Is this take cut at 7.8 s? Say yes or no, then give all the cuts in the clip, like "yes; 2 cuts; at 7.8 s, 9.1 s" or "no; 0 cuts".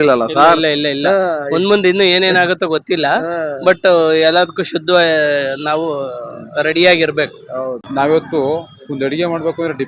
yes; 1 cut; at 7.8 s